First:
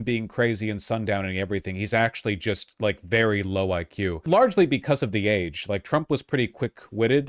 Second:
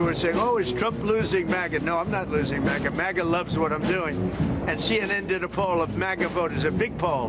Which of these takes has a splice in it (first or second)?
first